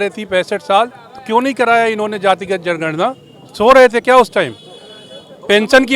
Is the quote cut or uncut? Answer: uncut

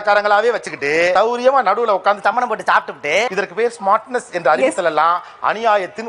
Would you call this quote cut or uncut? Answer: uncut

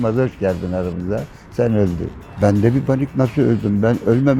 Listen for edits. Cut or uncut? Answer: uncut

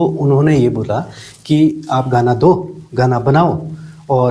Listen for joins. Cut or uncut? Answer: uncut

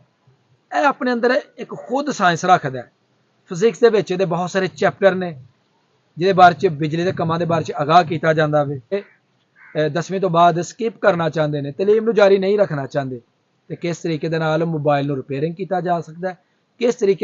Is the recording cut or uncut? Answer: cut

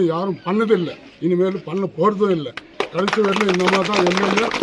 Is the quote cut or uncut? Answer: uncut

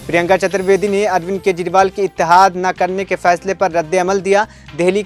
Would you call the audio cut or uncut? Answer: uncut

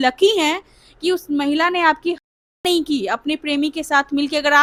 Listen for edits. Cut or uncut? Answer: uncut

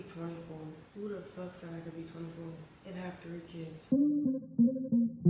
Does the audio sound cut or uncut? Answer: cut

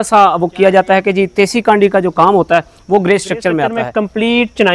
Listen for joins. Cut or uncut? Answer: cut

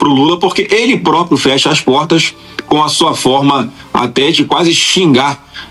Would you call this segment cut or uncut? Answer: uncut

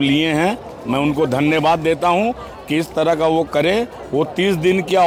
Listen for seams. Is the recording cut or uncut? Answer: uncut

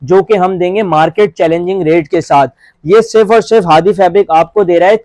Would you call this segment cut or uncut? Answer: cut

